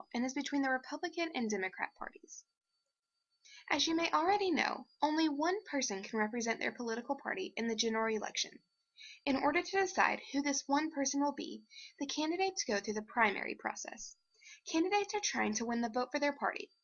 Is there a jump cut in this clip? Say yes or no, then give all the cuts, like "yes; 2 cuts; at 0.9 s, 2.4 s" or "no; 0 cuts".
yes; 1 cut; at 4.4 s